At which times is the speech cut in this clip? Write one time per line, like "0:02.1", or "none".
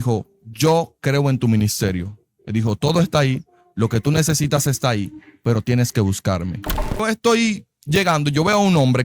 0:07.0